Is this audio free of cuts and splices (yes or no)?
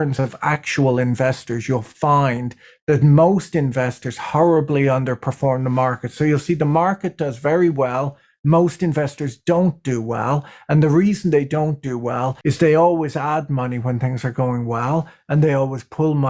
yes